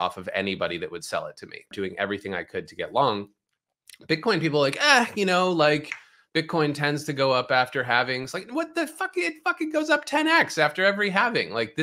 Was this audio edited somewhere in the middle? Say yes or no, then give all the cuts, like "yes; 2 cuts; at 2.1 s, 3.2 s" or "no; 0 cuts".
yes; 1 cut; at 1.7 s